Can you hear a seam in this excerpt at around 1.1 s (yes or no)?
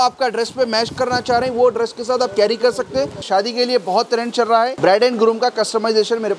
no